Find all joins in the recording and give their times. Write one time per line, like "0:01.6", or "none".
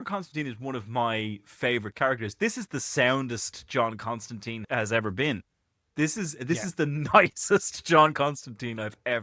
0:04.6